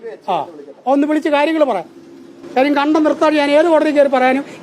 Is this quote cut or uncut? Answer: uncut